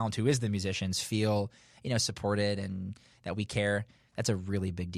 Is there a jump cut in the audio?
no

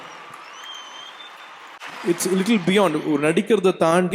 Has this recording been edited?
yes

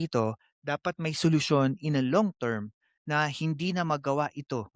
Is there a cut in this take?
no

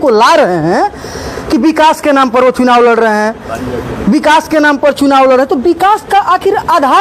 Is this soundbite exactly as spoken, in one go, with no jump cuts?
yes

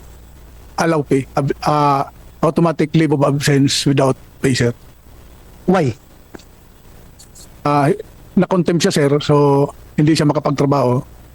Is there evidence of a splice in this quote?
no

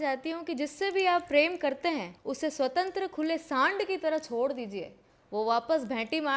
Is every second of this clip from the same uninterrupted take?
no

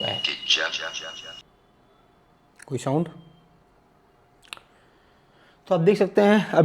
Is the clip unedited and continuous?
no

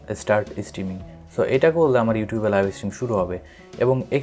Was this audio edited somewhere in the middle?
no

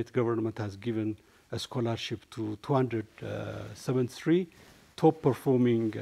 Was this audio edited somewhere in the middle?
no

